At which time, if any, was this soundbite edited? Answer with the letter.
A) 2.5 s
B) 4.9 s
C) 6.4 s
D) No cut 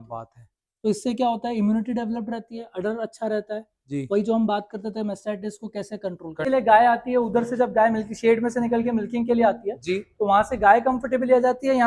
C